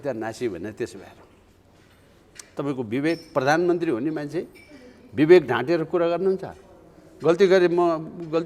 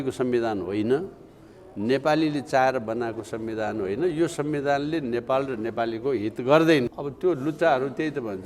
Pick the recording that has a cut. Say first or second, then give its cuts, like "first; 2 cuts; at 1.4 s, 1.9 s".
second; 1 cut; at 6.9 s